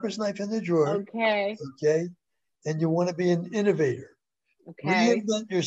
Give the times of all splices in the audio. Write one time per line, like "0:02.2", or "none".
none